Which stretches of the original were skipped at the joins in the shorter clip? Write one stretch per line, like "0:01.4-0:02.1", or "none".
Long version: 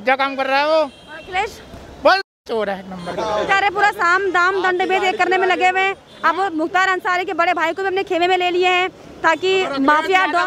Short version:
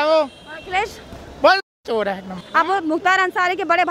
0:03.0-0:06.1